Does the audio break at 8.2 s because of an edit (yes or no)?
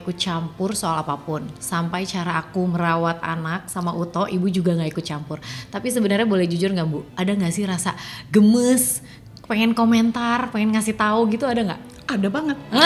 no